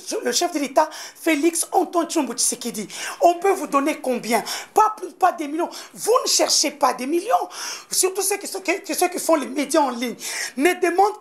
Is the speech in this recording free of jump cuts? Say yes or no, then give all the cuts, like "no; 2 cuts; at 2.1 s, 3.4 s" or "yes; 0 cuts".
yes; 0 cuts